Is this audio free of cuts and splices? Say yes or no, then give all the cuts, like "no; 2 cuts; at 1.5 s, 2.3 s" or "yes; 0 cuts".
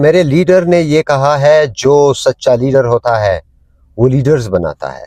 yes; 0 cuts